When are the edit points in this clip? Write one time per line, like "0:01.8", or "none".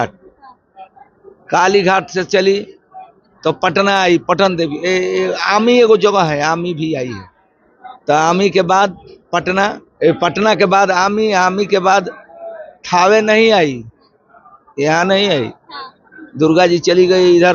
none